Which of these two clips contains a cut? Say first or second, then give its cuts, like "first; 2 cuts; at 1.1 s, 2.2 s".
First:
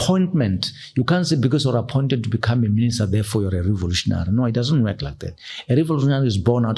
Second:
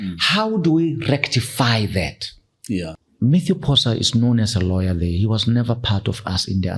second; 1 cut; at 3.0 s